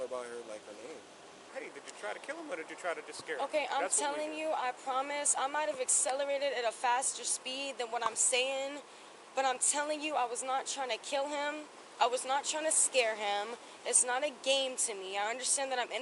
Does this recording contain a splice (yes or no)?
yes